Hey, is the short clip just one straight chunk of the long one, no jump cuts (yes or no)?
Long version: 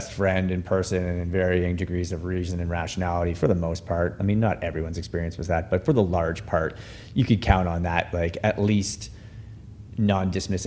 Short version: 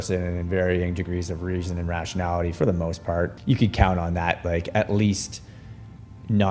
no